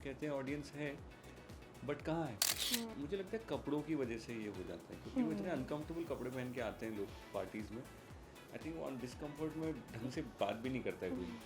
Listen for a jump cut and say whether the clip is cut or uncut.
cut